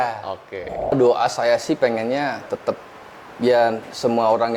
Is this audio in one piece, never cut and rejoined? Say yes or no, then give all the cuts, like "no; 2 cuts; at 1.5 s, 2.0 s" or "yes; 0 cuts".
no; 1 cut; at 0.9 s